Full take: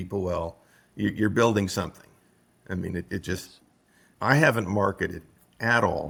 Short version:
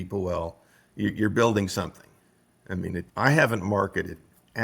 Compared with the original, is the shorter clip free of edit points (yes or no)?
no